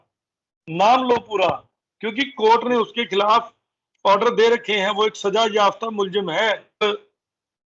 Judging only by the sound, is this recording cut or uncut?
cut